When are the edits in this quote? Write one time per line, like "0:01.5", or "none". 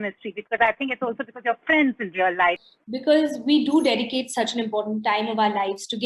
0:02.8